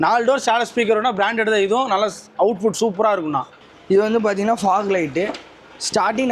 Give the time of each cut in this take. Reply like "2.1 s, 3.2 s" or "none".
3.6 s